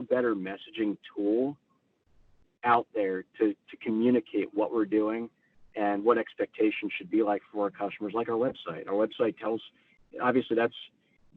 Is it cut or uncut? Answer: uncut